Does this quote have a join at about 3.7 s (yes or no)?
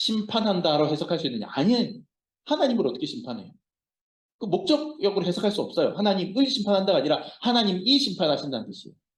no